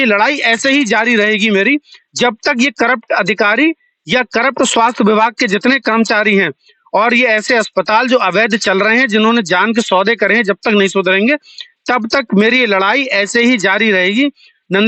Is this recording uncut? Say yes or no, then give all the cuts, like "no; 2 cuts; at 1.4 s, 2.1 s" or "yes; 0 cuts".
yes; 0 cuts